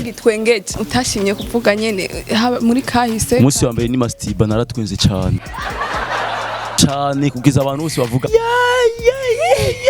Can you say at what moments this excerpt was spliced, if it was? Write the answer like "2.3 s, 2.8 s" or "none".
0.8 s, 6.7 s, 8.3 s